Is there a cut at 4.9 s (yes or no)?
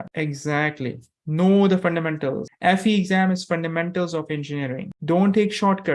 yes